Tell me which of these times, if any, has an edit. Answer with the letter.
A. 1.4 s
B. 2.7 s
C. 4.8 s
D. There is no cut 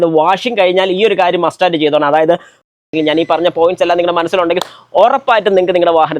B